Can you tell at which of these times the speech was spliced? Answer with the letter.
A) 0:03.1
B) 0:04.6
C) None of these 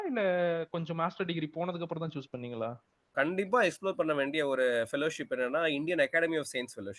A